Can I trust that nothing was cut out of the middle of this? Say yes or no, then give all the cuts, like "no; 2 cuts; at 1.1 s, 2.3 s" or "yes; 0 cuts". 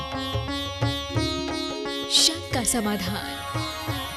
yes; 0 cuts